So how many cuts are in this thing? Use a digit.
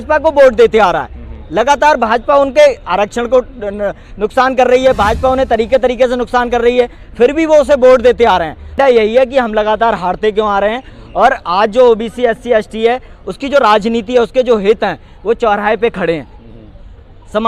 1